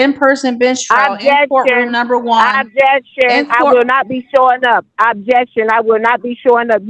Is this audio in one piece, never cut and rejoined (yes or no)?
yes